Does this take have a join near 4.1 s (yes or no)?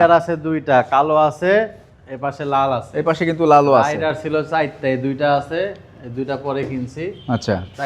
no